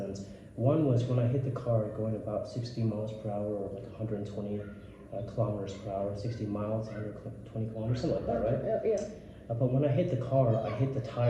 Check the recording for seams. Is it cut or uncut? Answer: uncut